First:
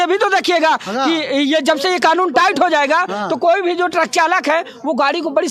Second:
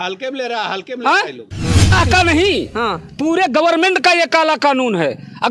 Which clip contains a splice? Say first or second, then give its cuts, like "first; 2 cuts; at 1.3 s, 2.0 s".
second; 1 cut; at 1.9 s